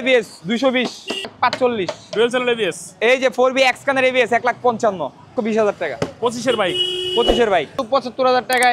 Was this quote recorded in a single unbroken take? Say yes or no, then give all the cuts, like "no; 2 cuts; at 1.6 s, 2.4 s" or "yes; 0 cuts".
no; 4 cuts; at 1.3 s, 2.9 s, 5.3 s, 7.8 s